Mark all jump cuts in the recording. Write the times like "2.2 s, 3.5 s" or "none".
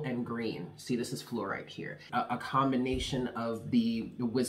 2.0 s

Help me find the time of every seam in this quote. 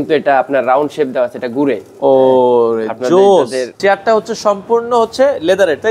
3.7 s

